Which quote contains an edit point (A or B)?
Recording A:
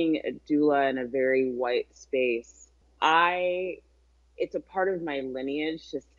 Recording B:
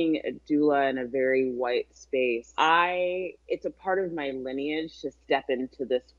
B